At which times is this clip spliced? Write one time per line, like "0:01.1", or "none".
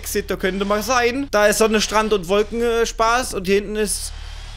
0:01.3